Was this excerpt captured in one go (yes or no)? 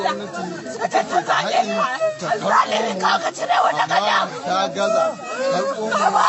yes